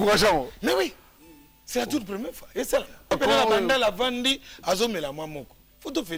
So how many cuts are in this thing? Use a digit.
1